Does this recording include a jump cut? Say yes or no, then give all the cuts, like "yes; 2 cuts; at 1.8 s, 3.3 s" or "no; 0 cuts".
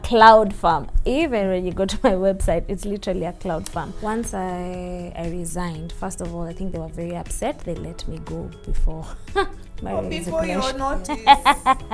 yes; 1 cut; at 3.9 s